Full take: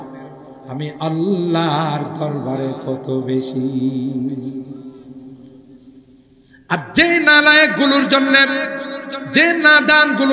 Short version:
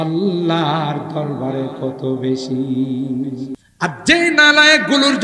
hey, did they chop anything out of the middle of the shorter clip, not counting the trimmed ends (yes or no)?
yes